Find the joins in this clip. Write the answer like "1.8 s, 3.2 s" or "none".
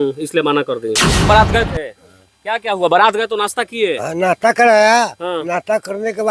1.3 s